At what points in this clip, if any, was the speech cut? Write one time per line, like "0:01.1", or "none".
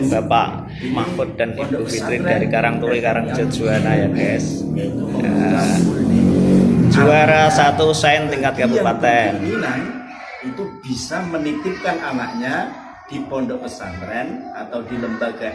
0:09.4